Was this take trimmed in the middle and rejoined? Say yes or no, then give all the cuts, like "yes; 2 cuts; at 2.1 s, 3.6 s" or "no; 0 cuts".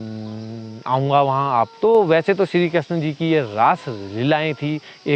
yes; 1 cut; at 1.7 s